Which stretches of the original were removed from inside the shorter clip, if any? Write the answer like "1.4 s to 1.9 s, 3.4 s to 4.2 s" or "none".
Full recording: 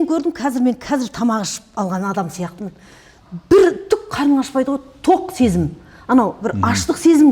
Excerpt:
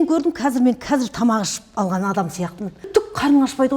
2.8 s to 3.8 s